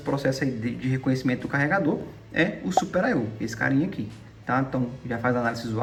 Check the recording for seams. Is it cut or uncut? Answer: uncut